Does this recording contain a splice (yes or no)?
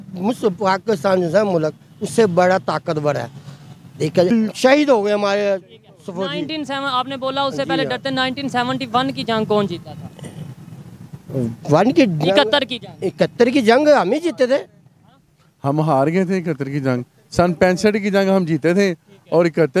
yes